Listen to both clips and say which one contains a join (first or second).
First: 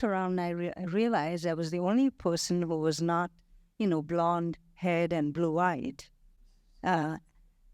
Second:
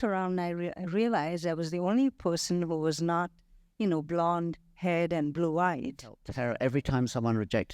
second